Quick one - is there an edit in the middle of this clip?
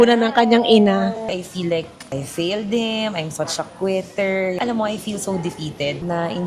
yes; 2 cuts; at 1.4 s, 4.6 s

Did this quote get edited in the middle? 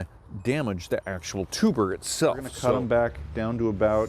yes; 1 cut; at 2.5 s

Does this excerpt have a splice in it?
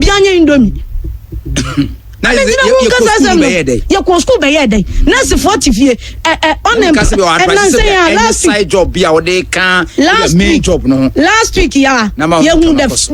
no; 0 cuts

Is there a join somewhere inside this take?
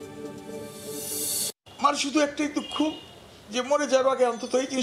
yes; 1 cut; at 1.4 s

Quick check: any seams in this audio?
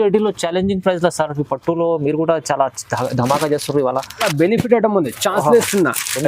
yes; 1 cut; at 4.3 s

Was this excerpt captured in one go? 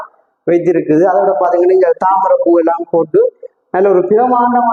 yes; 0 cuts

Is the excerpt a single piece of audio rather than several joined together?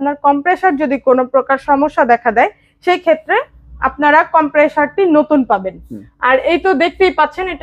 yes; 0 cuts

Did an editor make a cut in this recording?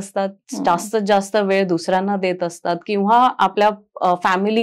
no; 0 cuts

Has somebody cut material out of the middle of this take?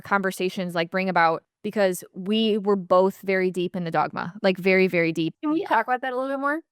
yes; 2 cuts; at 1.5 s, 5.3 s

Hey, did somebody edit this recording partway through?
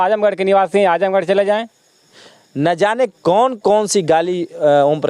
yes; 1 cut; at 2.1 s

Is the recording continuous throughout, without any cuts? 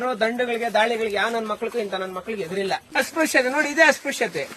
no; 1 cut; at 2.8 s

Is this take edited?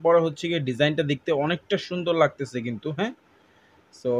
no; 0 cuts

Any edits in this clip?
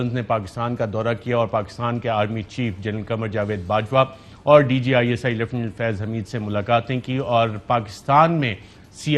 no; 0 cuts

